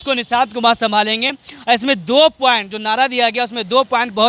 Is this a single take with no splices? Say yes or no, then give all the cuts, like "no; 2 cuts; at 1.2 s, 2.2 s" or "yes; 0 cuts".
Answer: yes; 0 cuts